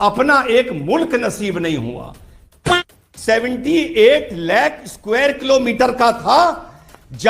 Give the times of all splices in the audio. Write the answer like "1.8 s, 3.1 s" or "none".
2.5 s